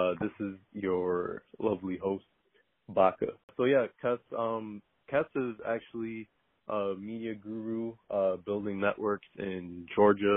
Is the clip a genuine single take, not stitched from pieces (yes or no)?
no